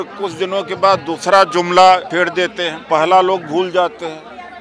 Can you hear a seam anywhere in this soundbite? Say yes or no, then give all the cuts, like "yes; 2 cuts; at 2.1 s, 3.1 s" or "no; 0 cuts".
yes; 1 cut; at 2.3 s